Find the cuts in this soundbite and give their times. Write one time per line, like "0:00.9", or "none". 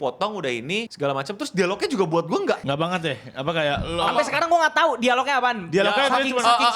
0:00.9